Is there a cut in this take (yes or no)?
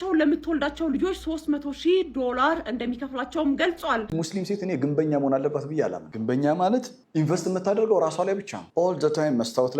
yes